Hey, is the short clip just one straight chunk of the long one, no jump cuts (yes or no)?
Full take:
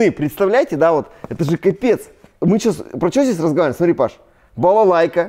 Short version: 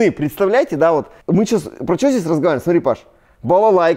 no